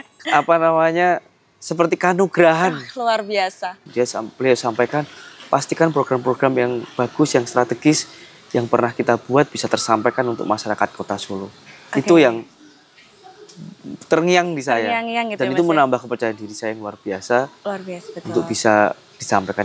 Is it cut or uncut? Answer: cut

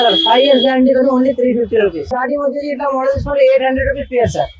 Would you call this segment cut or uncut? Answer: cut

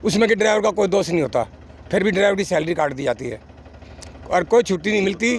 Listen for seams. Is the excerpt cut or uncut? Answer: uncut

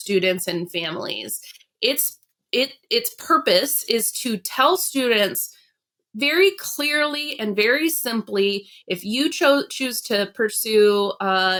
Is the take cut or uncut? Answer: uncut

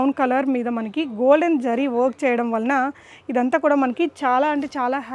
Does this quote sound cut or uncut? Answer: uncut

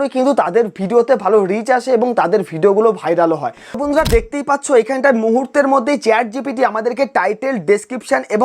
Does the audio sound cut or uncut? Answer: cut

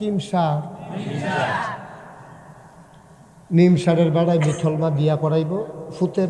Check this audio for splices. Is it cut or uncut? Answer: uncut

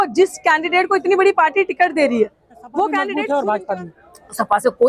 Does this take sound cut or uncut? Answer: cut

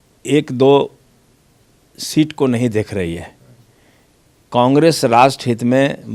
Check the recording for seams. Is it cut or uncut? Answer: uncut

